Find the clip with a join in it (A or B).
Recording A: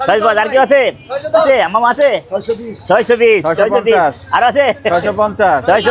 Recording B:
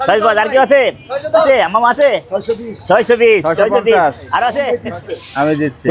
B